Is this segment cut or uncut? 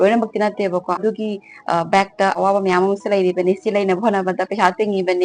cut